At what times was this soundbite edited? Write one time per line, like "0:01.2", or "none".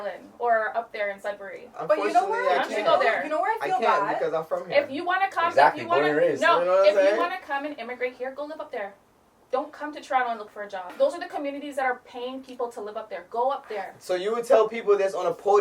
0:10.9